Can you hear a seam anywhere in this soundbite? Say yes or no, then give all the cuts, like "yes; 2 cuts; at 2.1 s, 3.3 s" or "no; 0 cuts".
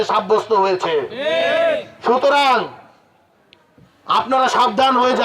no; 0 cuts